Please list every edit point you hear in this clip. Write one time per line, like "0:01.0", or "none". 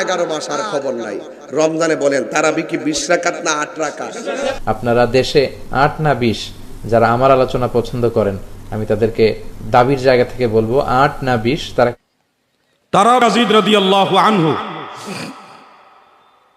0:04.6
0:12.0